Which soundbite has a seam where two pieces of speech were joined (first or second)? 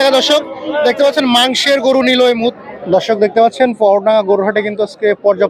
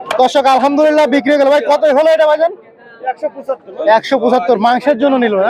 first